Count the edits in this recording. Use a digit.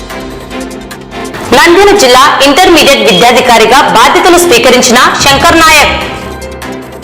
1